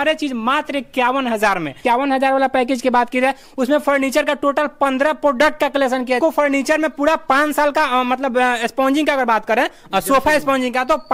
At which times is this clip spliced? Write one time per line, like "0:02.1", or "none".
0:01.8
0:06.2